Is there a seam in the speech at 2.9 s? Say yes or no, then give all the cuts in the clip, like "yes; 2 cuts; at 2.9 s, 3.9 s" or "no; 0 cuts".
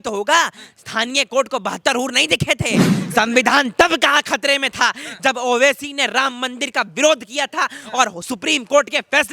yes; 1 cut; at 2.9 s